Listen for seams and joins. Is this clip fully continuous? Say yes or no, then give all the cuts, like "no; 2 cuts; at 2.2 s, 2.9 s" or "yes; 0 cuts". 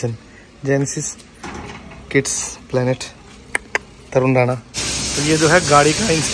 no; 1 cut; at 4.7 s